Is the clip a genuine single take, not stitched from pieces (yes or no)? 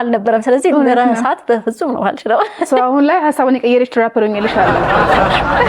yes